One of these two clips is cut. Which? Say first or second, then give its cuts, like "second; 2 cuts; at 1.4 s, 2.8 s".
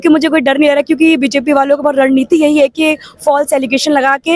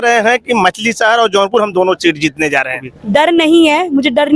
second; 1 cut; at 2.9 s